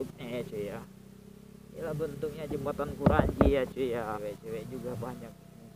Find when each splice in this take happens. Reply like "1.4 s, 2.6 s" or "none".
4.2 s